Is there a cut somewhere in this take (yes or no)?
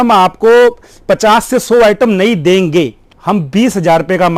yes